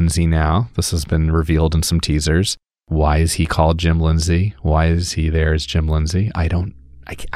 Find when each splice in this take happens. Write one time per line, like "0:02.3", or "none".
none